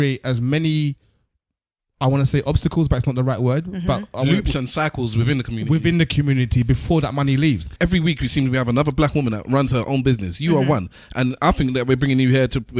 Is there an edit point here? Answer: yes; 1 cut; at 7.7 s

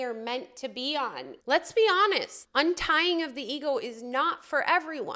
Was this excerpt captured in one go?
no; 2 cuts; at 1.3 s, 2.4 s

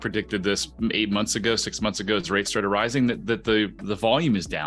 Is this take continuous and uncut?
yes; 0 cuts

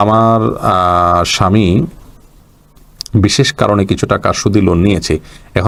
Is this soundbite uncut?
yes; 0 cuts

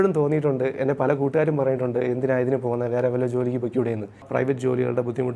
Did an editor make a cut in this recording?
yes; 1 cut; at 4.3 s

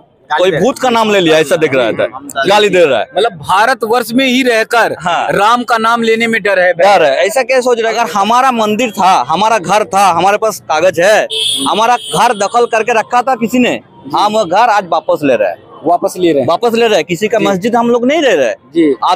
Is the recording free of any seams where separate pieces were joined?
no; 1 cut; at 7.8 s

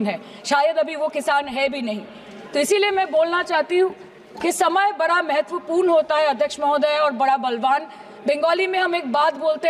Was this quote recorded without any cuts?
yes; 0 cuts

